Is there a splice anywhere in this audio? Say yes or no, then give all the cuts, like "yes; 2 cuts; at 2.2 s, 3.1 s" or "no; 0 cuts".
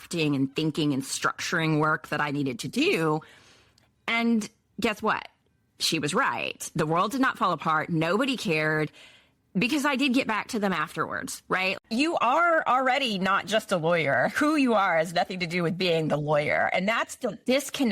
yes; 1 cut; at 11.7 s